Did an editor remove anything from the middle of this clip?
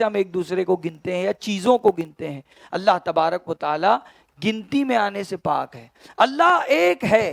no; 0 cuts

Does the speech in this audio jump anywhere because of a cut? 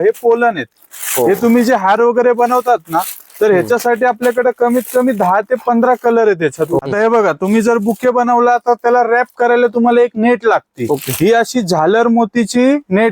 yes; 1 cut; at 6.8 s

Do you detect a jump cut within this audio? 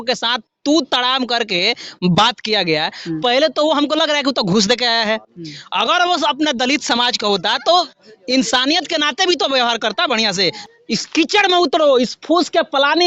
yes; 1 cut; at 10.6 s

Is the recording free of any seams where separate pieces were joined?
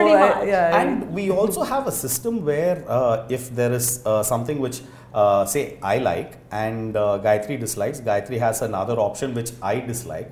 yes; 0 cuts

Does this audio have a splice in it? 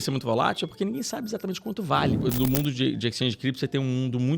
yes; 1 cut; at 2.2 s

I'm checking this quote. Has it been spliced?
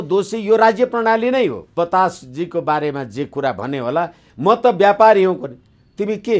yes; 1 cut; at 1.7 s

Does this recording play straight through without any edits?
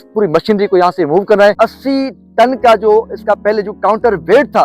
no; 1 cut; at 1.6 s

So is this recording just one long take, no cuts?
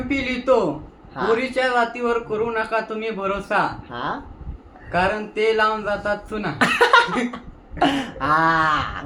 yes; 0 cuts

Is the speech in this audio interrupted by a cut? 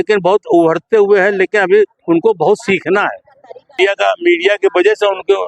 yes; 1 cut; at 3.8 s

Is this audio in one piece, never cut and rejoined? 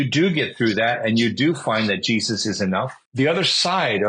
no; 1 cut; at 3.0 s

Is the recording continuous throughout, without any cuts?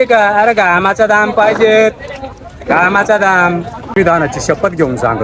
no; 1 cut; at 3.9 s

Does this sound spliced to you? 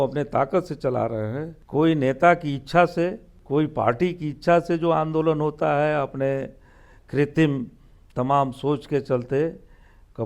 yes; 2 cuts; at 1.5 s, 3.3 s

